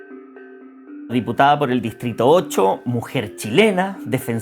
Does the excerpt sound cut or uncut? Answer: cut